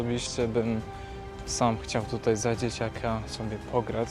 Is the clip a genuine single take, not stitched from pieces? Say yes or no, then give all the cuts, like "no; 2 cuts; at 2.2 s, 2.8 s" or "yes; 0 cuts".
yes; 0 cuts